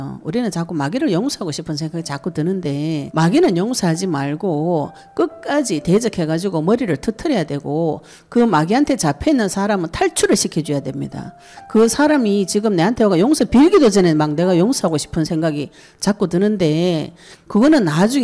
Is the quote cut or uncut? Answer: cut